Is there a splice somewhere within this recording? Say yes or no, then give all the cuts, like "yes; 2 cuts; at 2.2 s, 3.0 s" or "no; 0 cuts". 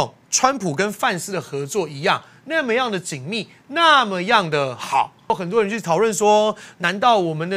yes; 1 cut; at 5.3 s